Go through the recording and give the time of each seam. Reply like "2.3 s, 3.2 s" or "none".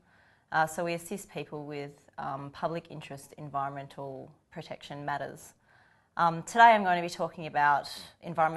1.5 s